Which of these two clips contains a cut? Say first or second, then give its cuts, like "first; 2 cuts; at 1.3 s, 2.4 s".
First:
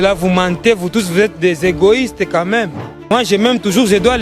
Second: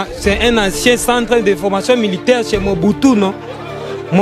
first; 1 cut; at 3.1 s